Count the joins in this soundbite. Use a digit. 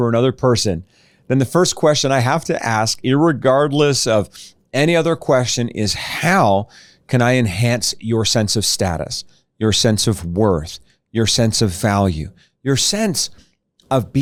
0